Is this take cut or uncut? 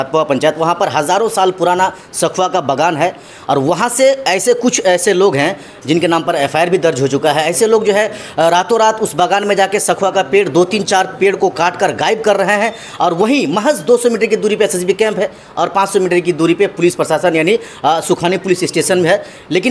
uncut